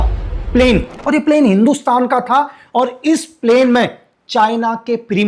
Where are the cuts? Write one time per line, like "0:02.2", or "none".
0:00.9

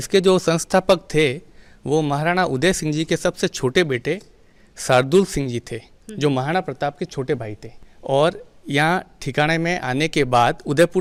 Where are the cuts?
none

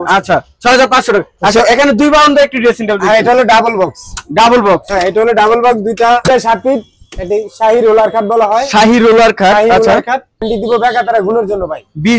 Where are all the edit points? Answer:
0:06.3
0:10.5

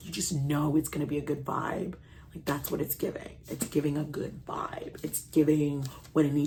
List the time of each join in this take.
none

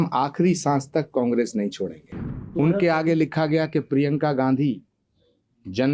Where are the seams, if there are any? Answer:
0:02.5

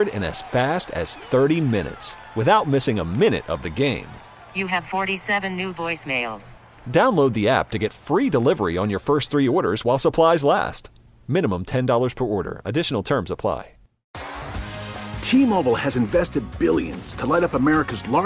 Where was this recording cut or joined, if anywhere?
0:14.1

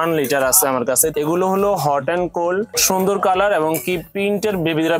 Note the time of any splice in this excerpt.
0:01.1
0:02.7

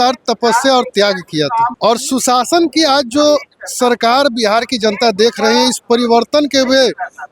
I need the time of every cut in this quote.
0:01.7

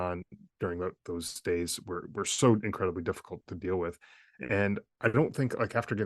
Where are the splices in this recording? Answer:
0:04.9

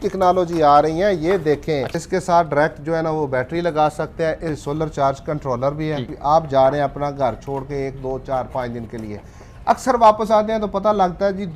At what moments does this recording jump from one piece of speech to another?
0:01.9
0:04.7
0:06.1

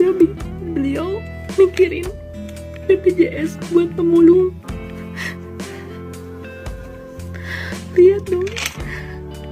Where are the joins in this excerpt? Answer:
0:05.5

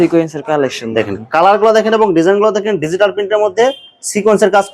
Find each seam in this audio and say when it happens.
none

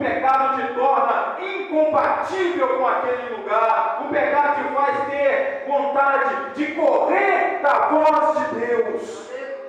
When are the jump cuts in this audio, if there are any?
none

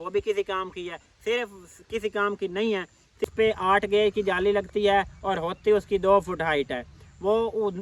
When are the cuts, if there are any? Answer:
0:03.2

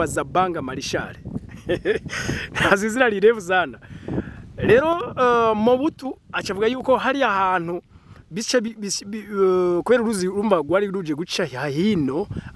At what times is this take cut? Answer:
none

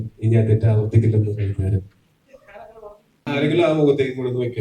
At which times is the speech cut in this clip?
0:03.3

